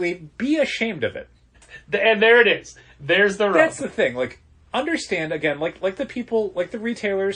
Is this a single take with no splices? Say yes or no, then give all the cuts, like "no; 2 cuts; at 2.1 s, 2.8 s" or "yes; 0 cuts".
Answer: no; 1 cut; at 1.7 s